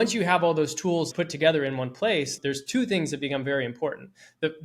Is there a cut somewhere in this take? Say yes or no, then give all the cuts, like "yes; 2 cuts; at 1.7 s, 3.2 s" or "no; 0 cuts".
yes; 1 cut; at 1.1 s